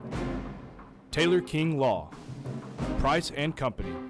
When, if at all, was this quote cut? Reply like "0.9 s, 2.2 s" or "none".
1.1 s

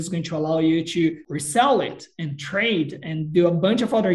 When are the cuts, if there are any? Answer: 1.3 s

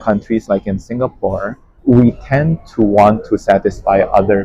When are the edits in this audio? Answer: 1.7 s

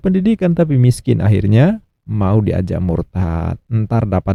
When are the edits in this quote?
none

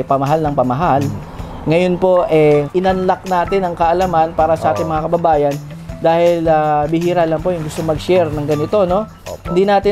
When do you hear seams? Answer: 2.7 s

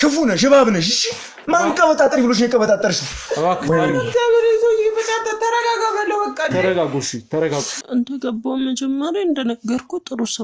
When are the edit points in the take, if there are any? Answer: 7.8 s

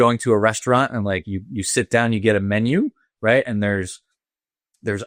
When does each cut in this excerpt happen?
none

